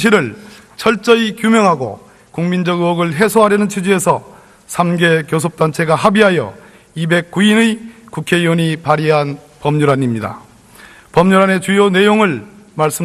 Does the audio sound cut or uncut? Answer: cut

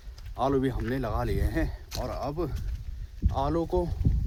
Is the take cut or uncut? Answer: uncut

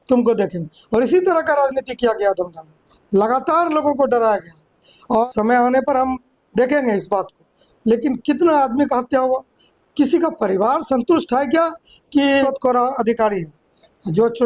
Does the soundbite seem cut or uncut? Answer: cut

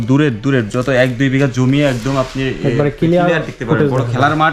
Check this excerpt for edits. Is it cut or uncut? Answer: uncut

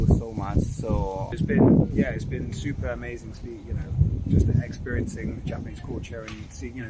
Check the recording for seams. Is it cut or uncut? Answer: cut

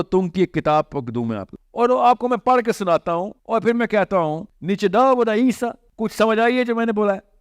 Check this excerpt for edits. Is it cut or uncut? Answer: cut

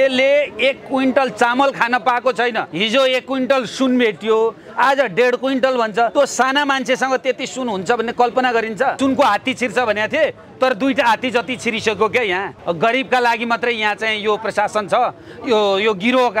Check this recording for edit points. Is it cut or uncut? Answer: cut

